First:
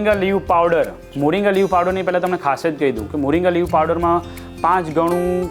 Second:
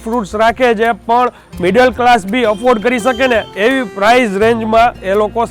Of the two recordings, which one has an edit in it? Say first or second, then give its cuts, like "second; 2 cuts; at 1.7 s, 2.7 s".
first; 1 cut; at 1.0 s